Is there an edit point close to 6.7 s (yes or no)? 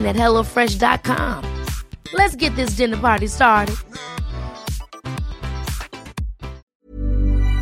yes